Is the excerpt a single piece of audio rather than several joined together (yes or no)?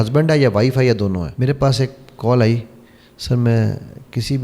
no